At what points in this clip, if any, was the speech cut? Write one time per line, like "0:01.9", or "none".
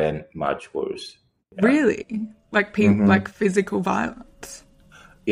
none